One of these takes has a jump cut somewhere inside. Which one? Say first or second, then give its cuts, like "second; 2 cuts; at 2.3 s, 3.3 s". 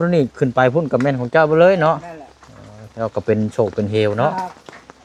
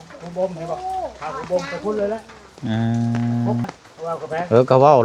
second; 1 cut; at 3.7 s